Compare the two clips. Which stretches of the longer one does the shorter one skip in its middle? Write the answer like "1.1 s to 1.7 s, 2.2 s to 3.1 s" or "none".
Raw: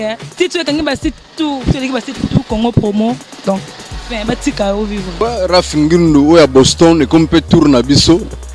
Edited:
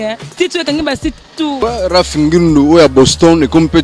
1.6 s to 5.2 s